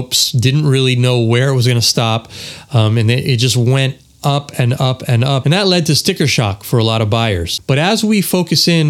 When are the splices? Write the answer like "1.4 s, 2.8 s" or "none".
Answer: 5.4 s, 7.5 s